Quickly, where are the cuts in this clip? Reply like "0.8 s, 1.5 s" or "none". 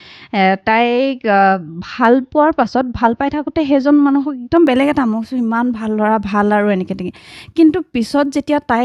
none